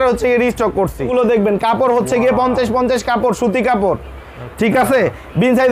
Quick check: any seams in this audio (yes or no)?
yes